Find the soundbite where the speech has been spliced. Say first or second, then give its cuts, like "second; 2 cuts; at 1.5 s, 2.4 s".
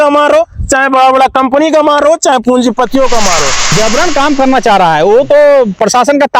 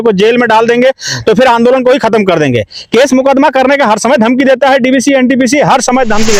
first; 1 cut; at 3.7 s